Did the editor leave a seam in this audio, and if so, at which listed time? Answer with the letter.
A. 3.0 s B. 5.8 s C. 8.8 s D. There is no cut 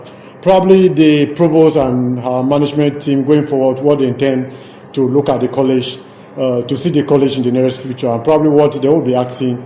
D